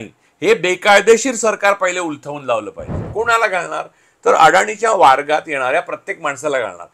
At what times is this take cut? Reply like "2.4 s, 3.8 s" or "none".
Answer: 3.0 s